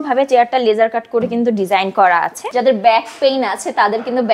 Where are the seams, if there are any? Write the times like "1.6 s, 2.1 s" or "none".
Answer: 2.4 s